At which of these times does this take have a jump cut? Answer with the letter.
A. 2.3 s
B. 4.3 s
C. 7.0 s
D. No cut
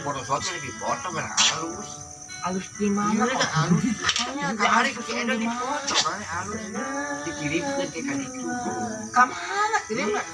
D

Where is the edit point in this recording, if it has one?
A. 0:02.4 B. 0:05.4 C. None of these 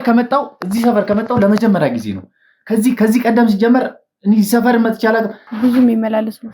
B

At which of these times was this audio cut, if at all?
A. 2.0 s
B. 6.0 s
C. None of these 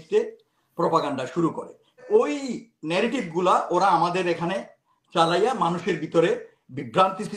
A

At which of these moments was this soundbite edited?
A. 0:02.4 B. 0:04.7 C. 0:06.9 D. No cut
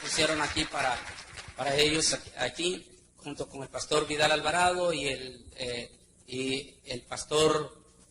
A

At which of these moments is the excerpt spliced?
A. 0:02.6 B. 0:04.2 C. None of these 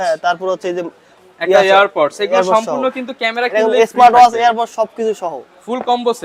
C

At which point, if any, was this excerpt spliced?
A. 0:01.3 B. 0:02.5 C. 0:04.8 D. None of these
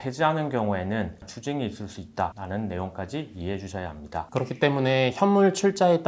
A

